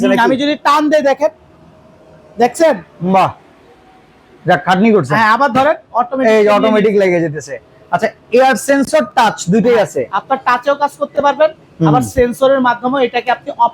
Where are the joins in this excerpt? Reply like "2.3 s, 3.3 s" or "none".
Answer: none